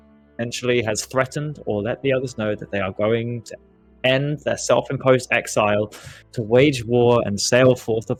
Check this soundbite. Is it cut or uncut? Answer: uncut